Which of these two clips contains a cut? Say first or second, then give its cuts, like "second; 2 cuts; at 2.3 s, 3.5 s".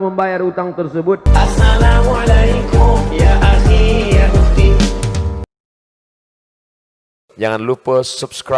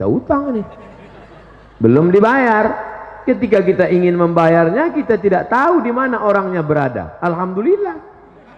first; 1 cut; at 1.2 s